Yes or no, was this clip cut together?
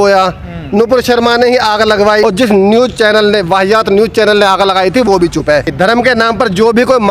yes